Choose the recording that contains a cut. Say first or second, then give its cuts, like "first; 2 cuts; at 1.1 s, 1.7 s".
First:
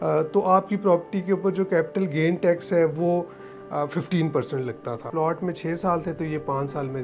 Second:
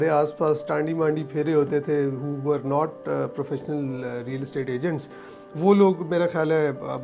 first; 1 cut; at 5.1 s